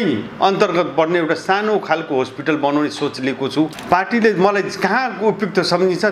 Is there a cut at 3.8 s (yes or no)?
yes